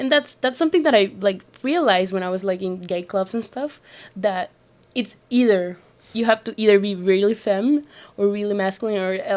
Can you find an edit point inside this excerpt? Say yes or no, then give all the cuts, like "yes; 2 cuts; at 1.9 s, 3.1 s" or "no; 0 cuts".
no; 0 cuts